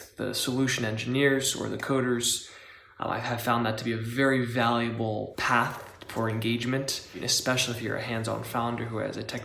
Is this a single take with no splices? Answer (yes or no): no